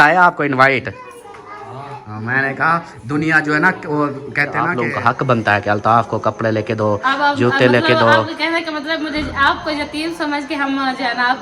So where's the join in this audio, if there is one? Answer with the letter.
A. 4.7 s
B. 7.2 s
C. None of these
A